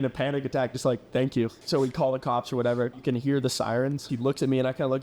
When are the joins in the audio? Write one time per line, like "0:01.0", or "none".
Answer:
0:01.6
0:03.0
0:04.1